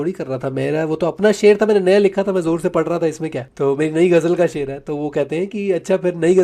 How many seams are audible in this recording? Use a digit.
1